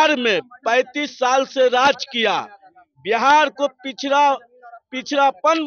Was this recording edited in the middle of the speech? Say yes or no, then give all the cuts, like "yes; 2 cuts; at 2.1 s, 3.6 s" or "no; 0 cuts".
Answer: no; 0 cuts